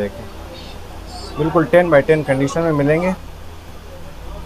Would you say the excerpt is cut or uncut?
cut